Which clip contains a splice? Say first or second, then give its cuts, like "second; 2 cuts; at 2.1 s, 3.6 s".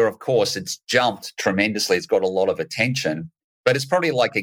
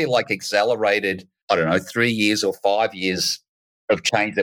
second; 1 cut; at 1.3 s